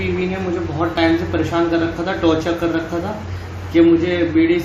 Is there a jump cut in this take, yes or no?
no